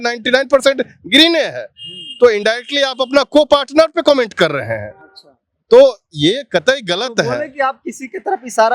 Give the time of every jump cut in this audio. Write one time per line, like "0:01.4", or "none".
none

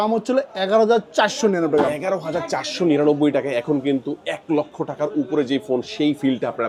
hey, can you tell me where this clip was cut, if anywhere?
none

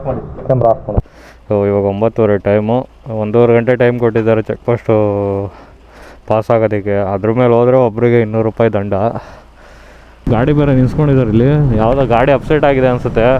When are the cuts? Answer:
0:01.1
0:10.3

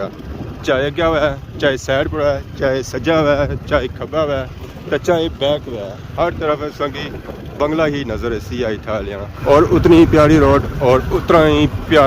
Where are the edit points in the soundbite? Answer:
0:09.3

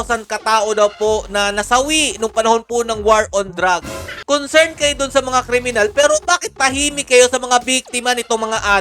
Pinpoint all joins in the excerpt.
none

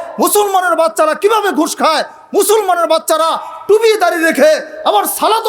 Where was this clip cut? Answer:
none

